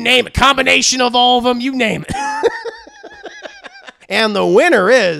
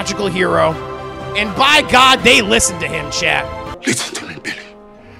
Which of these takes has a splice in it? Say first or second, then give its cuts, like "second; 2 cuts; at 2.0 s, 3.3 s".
first; 1 cut; at 4.0 s